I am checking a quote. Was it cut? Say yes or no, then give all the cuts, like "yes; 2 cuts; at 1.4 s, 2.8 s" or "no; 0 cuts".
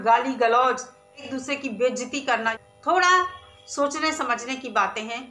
yes; 2 cuts; at 1.3 s, 2.6 s